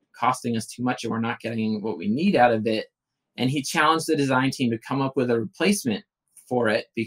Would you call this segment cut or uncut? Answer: uncut